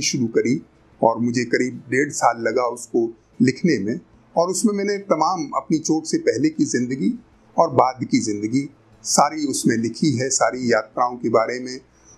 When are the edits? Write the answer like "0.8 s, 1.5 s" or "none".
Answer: none